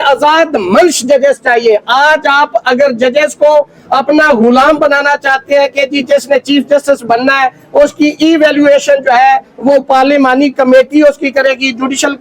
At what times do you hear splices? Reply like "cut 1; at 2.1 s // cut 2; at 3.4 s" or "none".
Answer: none